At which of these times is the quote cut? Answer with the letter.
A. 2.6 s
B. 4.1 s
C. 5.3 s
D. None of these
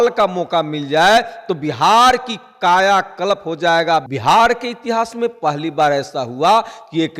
B